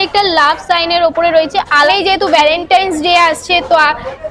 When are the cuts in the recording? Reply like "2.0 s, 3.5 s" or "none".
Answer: 1.9 s